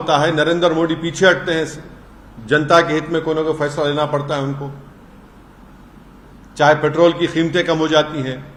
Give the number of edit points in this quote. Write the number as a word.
zero